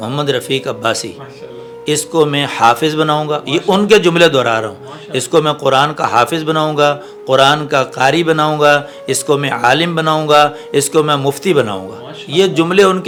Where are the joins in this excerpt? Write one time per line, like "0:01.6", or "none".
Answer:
none